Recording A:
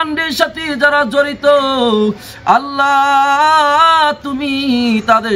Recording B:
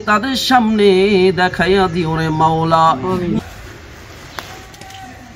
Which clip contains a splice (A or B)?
B